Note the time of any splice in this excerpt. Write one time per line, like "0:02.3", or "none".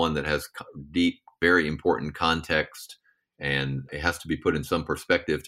0:01.3
0:03.9